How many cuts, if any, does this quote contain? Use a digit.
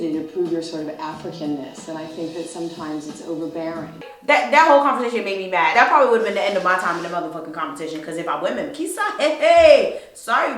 2